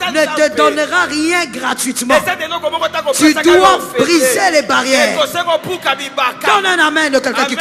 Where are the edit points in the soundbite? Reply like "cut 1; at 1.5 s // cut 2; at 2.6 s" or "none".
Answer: none